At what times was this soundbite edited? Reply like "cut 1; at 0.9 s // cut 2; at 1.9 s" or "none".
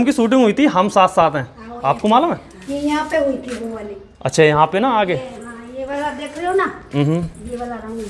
cut 1; at 2.6 s